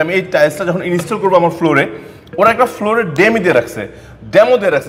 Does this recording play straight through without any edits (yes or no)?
yes